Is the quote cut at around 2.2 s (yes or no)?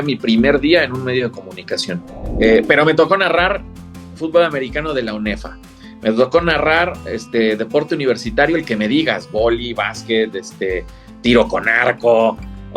yes